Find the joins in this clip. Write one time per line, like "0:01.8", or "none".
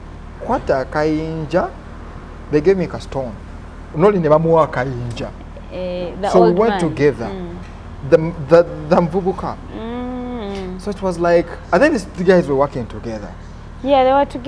0:03.9